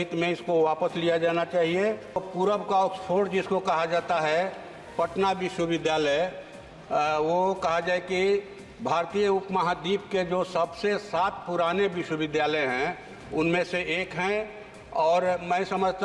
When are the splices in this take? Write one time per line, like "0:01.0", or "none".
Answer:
0:02.3